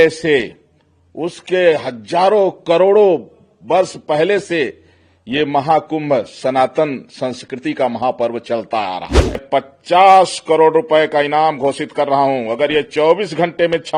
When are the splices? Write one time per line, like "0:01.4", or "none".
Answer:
0:09.4

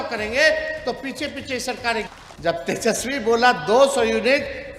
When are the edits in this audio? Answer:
0:02.2

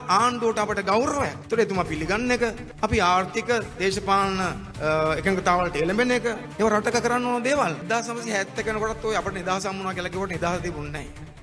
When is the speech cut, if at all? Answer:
0:01.4
0:02.6
0:04.6
0:06.5
0:07.8

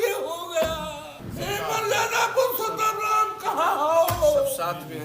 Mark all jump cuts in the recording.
0:01.2

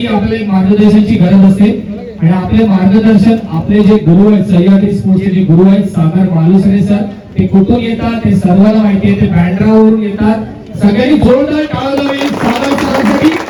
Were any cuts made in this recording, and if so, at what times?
none

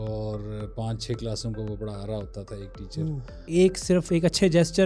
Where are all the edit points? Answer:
0:03.5

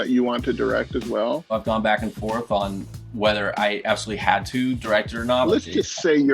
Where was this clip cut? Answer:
0:01.5

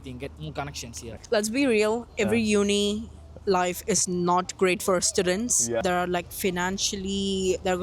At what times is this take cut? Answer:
0:01.2
0:05.8

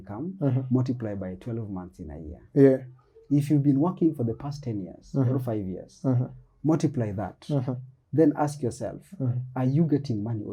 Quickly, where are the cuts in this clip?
none

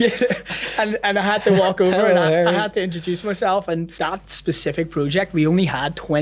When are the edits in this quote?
0:03.9

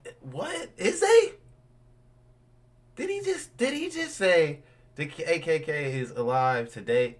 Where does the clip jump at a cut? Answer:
none

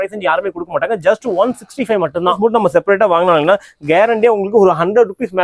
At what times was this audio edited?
0:02.4

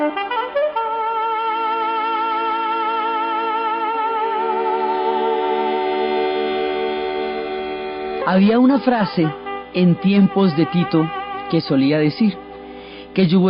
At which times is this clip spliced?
none

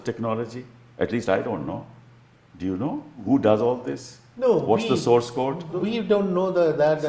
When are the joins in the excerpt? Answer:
0:03.2
0:05.8

